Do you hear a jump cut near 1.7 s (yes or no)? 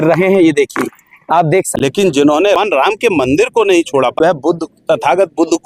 yes